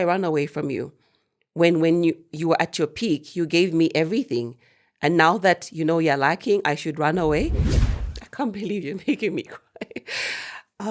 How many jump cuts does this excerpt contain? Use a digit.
1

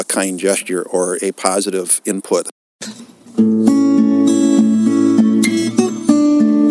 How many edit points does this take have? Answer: 1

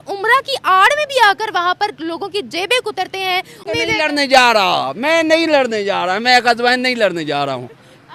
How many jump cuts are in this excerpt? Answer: 0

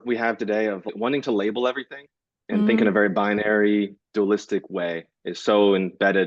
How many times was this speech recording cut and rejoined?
1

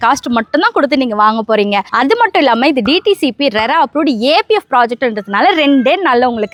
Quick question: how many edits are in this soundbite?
0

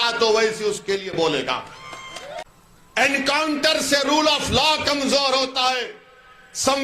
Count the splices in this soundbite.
1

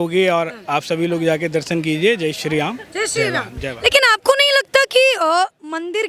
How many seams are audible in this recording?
0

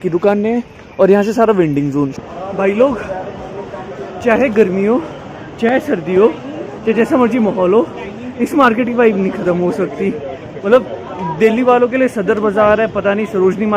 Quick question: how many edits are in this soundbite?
1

